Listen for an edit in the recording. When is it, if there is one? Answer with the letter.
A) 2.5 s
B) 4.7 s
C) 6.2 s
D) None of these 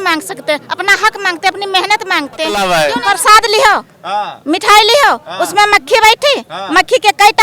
A